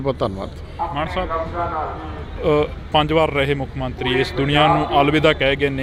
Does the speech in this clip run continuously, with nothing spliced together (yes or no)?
yes